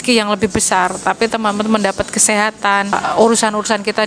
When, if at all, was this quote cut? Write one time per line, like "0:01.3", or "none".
0:03.0